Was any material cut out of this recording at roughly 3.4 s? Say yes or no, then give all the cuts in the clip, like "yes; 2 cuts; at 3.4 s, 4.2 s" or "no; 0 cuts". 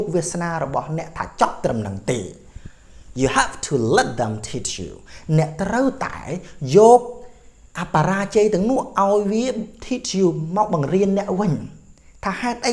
no; 0 cuts